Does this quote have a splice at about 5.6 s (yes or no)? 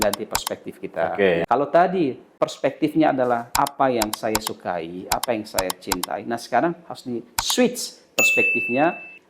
no